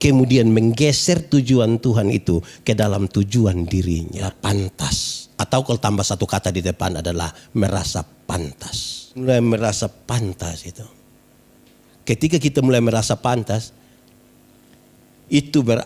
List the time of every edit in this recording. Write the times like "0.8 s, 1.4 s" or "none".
4.2 s, 9.2 s